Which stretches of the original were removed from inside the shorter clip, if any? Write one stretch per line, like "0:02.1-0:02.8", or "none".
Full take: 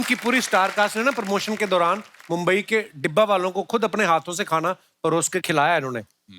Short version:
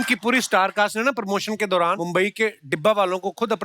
0:02.0-0:02.3